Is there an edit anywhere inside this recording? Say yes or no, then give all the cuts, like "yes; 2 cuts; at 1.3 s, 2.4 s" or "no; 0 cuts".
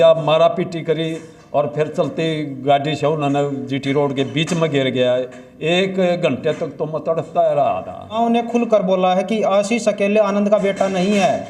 yes; 1 cut; at 8.2 s